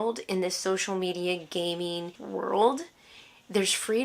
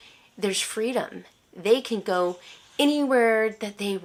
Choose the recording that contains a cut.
first; 1 cut; at 2.2 s

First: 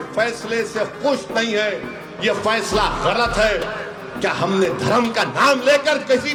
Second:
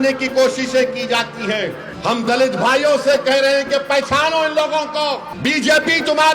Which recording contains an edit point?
second; 2 cuts; at 1.9 s, 5.3 s

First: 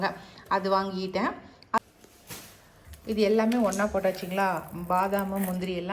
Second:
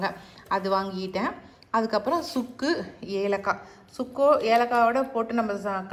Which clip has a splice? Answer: first; 1 cut; at 1.8 s

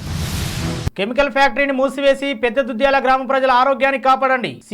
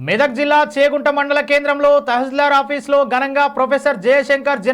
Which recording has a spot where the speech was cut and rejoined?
first; 1 cut; at 0.9 s

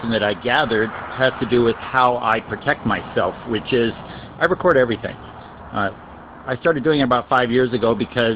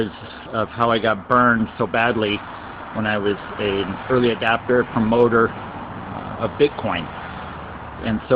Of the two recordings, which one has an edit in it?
first; 1 cut; at 3.4 s

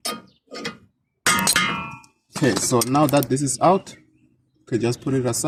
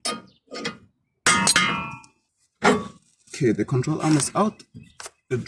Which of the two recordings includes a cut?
second; 1 cut; at 2.3 s

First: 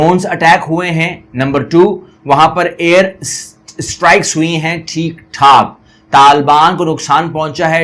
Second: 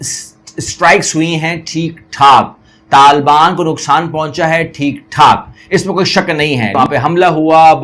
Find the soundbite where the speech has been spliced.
second; 1 cut; at 6.7 s

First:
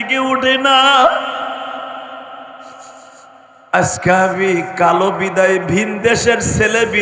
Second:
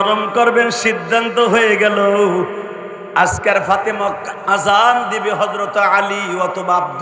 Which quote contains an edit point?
second; 1 cut; at 4.3 s

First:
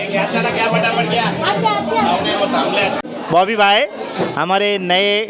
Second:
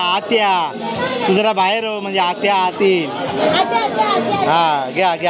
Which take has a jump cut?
first; 1 cut; at 3.1 s

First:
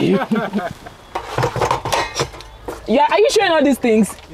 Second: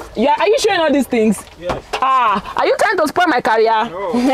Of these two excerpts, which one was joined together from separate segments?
first; 1 cut; at 1.1 s

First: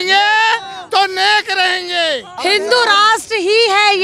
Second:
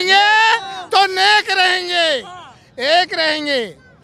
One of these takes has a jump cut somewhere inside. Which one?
first; 1 cut; at 2.3 s

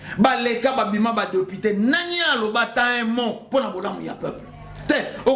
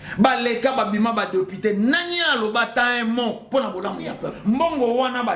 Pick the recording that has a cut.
second; 1 cut; at 4.3 s

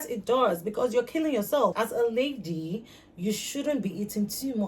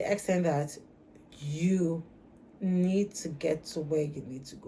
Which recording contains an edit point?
first; 1 cut; at 1.7 s

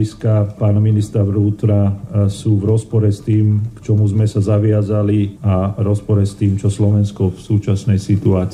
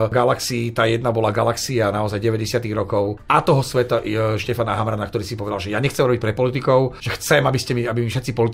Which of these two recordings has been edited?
second; 2 cuts; at 3.2 s, 7.1 s

